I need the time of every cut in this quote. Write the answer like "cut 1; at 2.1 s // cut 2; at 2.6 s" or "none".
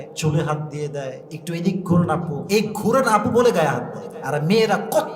cut 1; at 1.3 s // cut 2; at 2.4 s